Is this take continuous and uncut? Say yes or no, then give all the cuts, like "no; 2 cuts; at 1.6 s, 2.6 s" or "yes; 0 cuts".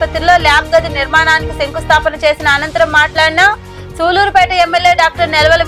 yes; 0 cuts